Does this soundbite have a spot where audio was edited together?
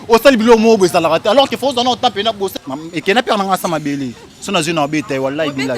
yes; 1 cut; at 2.5 s

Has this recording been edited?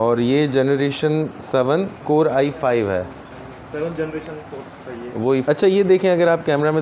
yes; 1 cut; at 5.5 s

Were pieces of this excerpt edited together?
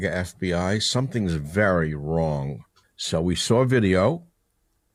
no; 0 cuts

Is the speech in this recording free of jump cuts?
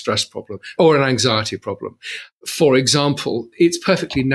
no; 2 cuts; at 0.7 s, 3.5 s

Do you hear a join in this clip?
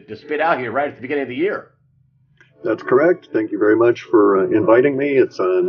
yes; 1 cut; at 1.0 s

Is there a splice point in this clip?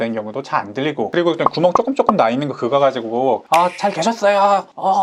no; 0 cuts

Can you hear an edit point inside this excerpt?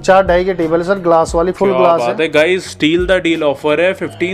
no; 0 cuts

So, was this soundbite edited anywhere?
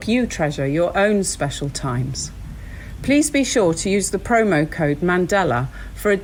no; 0 cuts

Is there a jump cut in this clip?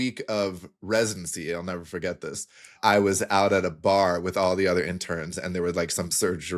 yes; 1 cut; at 2.8 s

